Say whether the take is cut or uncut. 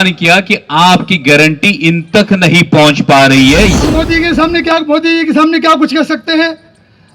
cut